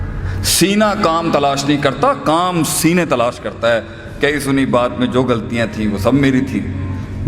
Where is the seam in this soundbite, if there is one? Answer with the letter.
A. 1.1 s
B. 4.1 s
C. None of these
C